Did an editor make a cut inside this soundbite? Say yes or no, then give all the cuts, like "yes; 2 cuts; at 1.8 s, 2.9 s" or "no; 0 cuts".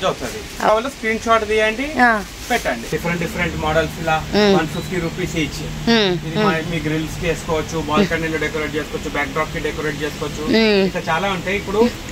yes; 2 cuts; at 0.7 s, 2.9 s